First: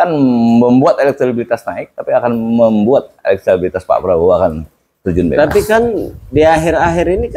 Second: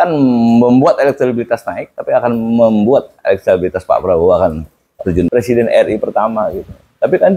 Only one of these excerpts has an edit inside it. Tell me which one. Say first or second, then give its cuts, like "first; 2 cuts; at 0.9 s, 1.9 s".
second; 1 cut; at 5.3 s